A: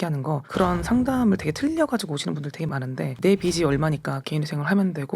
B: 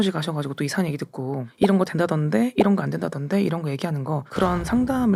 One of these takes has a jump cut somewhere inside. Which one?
A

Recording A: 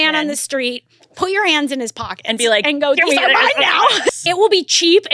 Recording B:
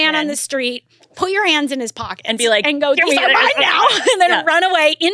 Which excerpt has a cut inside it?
A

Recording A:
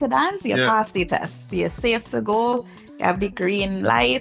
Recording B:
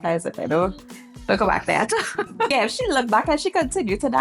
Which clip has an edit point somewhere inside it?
B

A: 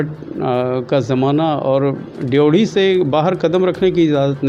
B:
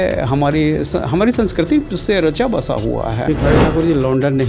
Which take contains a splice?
B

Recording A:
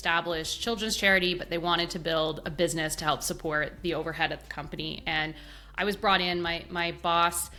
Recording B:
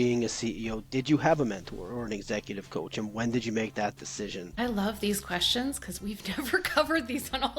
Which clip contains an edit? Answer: B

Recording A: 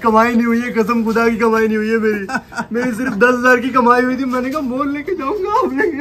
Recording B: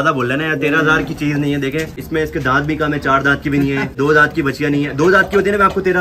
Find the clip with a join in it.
B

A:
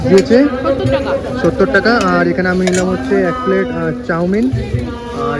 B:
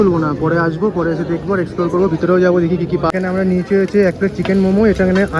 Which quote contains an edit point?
B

